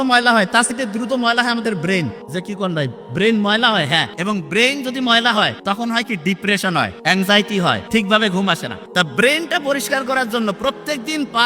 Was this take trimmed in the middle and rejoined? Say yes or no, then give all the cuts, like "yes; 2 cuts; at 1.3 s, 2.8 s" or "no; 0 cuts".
yes; 7 cuts; at 0.7 s, 2.2 s, 4.1 s, 5.6 s, 7.0 s, 7.8 s, 8.8 s